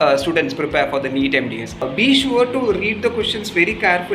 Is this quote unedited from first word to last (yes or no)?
no